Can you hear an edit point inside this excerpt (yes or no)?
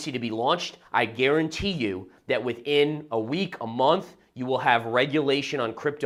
no